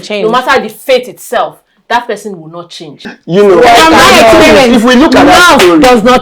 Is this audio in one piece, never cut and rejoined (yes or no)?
no